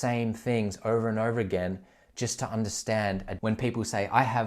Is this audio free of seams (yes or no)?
no